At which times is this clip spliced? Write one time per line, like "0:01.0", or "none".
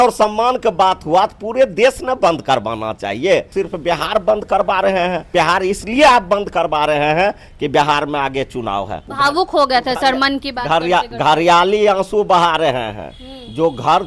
0:03.5
0:05.3
0:09.0